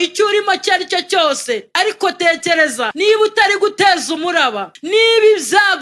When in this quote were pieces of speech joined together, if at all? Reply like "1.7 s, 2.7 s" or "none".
1.7 s, 2.9 s, 4.7 s